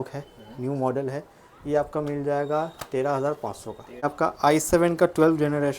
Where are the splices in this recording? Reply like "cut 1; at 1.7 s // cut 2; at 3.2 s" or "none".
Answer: cut 1; at 4.0 s